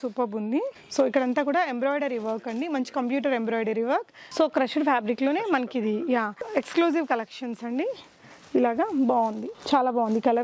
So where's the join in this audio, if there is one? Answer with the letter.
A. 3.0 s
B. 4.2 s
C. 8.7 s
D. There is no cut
B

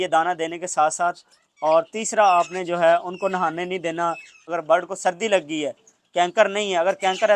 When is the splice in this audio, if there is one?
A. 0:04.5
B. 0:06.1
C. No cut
A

